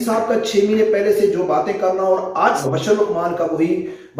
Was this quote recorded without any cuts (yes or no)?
no